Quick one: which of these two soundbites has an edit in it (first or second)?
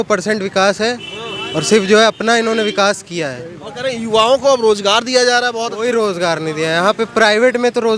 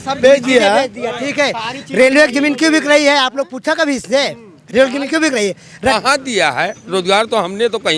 second